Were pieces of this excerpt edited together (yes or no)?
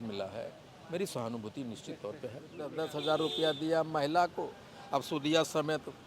yes